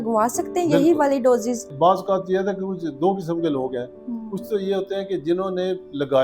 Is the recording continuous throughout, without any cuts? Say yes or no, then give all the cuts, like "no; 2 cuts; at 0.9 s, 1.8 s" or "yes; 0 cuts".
no; 1 cut; at 1.7 s